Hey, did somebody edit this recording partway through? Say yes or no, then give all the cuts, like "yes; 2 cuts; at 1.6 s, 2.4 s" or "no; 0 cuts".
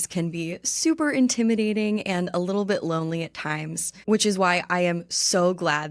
yes; 1 cut; at 3.9 s